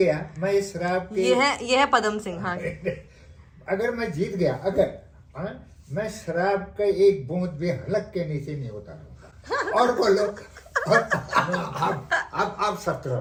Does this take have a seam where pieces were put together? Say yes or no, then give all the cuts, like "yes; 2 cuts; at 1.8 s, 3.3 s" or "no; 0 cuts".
no; 0 cuts